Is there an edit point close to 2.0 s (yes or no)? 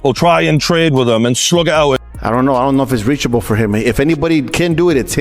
yes